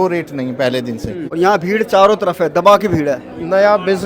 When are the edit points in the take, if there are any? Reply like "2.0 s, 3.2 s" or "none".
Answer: 1.2 s

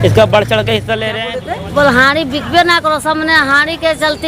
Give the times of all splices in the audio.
1.4 s

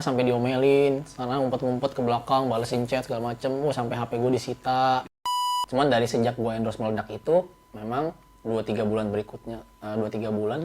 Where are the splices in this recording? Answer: 5.3 s

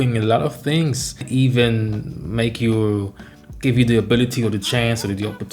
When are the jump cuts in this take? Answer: 1.2 s

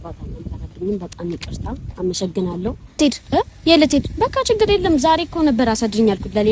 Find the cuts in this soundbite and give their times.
3.0 s

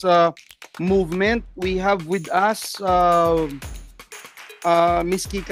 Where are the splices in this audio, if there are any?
none

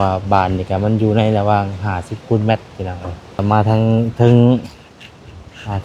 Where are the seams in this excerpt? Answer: 3.4 s

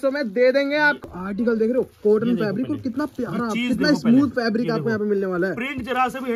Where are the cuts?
1.0 s

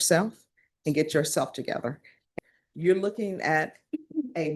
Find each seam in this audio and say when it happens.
2.4 s

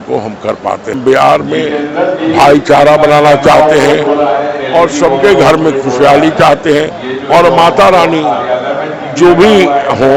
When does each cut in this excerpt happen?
1.0 s

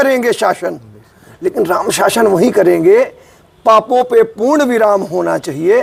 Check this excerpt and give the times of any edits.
none

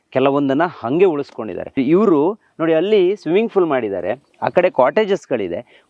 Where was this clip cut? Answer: 1.7 s

